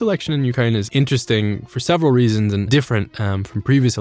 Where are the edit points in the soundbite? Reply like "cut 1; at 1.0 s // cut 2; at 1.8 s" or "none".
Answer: cut 1; at 0.9 s // cut 2; at 2.7 s

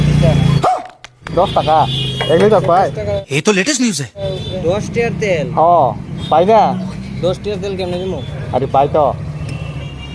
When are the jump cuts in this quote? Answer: cut 1; at 4.5 s // cut 2; at 6.2 s // cut 3; at 8.4 s

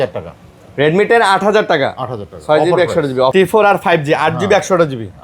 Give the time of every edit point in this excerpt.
cut 1; at 3.3 s

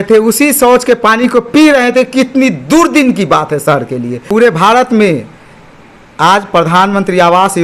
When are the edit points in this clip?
cut 1; at 4.2 s

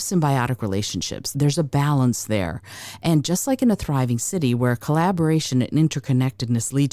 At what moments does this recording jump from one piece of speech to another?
cut 1; at 1.2 s

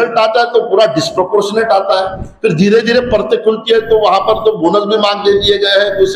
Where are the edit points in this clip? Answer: none

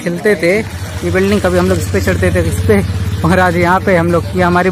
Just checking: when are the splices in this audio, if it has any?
cut 1; at 1.2 s

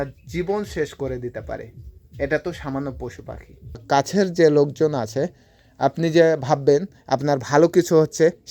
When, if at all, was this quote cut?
cut 1; at 3.8 s

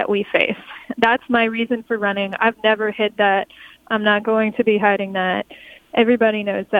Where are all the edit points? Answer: cut 1; at 2.4 s

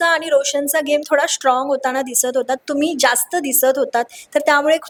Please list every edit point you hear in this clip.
none

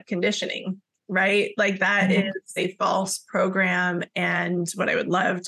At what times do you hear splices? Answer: cut 1; at 2.5 s

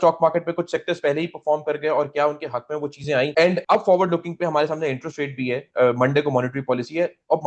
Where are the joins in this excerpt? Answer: none

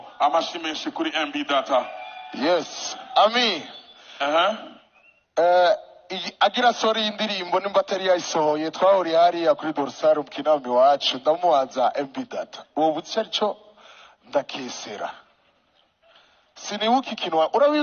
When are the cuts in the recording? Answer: none

